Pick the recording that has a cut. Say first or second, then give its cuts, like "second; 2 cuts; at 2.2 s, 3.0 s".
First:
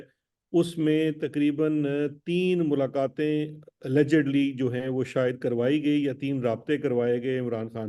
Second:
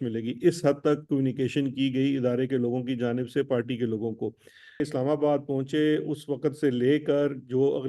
second; 1 cut; at 4.9 s